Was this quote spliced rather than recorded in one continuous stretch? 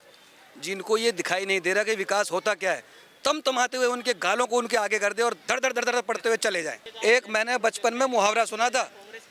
yes; 1 cut; at 6.8 s

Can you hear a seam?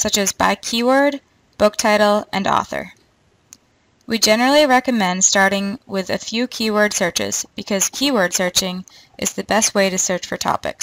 yes; 1 cut; at 5.8 s

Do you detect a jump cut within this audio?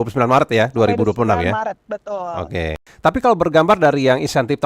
no; 0 cuts

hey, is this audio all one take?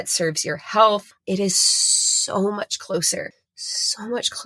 no; 1 cut; at 1.2 s

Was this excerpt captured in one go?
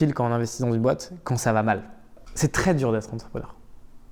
no; 1 cut; at 2.2 s

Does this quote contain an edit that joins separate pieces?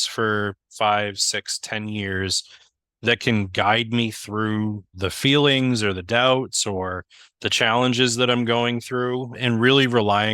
yes; 2 cuts; at 4.9 s, 9.3 s

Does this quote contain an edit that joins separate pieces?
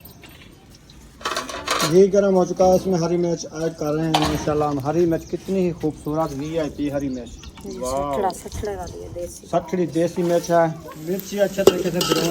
yes; 1 cut; at 10.9 s

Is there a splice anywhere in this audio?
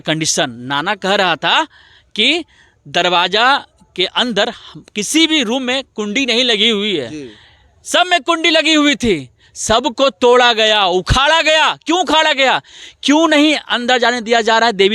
no; 0 cuts

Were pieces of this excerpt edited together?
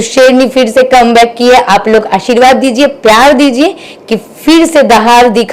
no; 0 cuts

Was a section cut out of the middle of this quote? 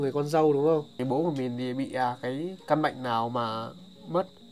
yes; 1 cut; at 0.9 s

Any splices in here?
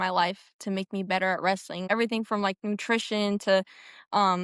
yes; 1 cut; at 1.8 s

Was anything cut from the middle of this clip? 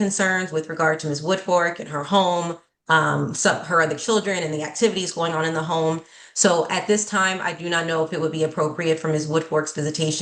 no; 0 cuts

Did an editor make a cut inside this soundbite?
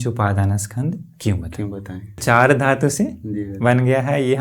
yes; 1 cut; at 2.2 s

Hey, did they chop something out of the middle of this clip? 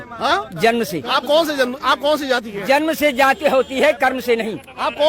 no; 0 cuts

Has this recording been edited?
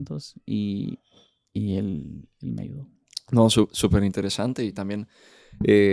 no; 0 cuts

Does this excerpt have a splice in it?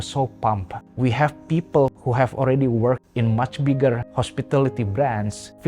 yes; 2 cuts; at 1.9 s, 4.1 s

